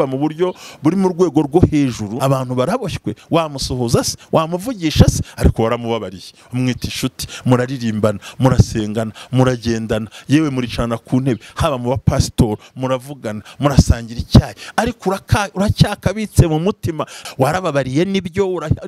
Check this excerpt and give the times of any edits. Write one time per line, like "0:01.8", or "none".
0:02.1
0:17.2